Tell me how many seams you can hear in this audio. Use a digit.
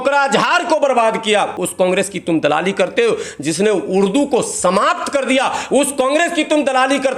0